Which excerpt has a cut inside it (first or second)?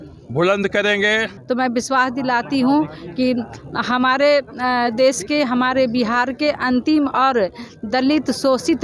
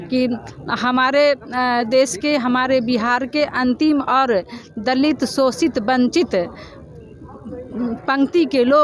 first